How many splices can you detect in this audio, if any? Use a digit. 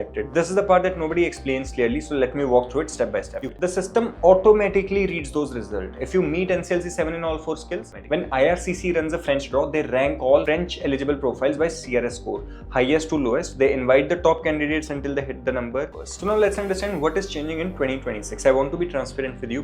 3